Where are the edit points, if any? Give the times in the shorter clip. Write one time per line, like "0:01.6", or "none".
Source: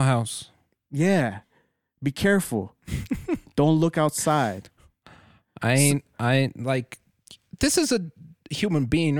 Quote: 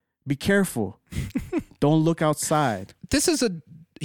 0:02.9

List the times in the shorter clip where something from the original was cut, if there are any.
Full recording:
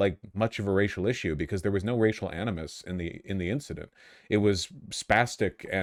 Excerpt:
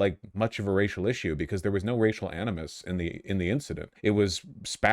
0:03.9

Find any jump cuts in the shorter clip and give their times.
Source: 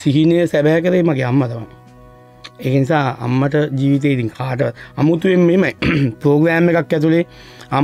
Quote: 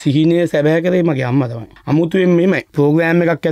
0:01.7
0:02.7

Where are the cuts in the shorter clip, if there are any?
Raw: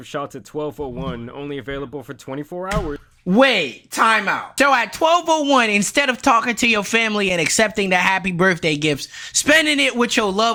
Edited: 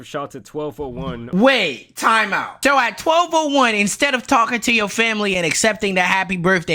0:01.2

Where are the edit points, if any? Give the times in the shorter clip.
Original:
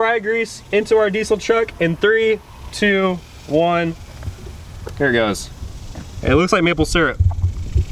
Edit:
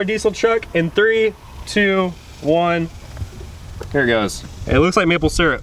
0:04.5

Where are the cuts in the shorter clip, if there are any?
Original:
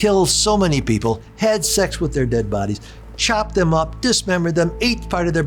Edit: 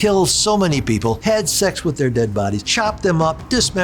0:01.2
0:02.6

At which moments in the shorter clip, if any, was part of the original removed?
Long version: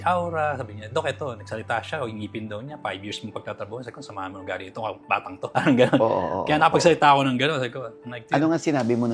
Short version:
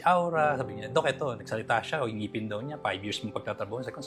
none

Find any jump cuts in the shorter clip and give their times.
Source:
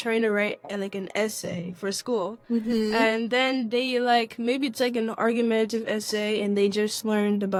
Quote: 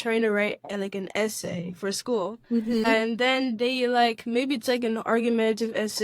0:02.8

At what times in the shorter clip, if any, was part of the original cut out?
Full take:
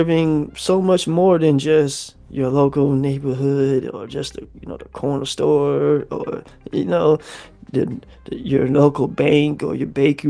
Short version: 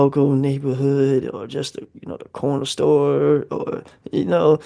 none

